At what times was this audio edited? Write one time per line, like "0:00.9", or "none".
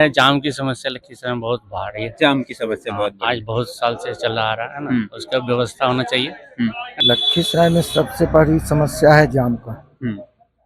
0:06.9